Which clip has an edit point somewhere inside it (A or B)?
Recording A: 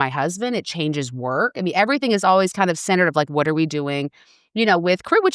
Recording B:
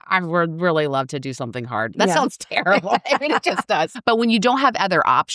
B